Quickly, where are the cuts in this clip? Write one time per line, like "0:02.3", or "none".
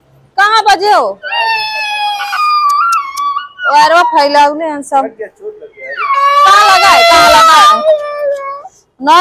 none